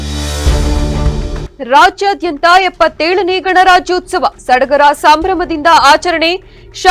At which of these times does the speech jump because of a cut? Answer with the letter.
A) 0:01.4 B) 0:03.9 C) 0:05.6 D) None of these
A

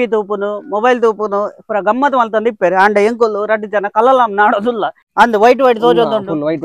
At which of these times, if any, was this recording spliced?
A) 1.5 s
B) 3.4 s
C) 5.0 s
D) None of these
C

